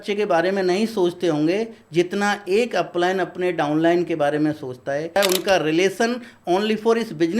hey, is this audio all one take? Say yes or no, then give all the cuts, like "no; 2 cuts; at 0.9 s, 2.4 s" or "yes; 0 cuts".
no; 1 cut; at 5.1 s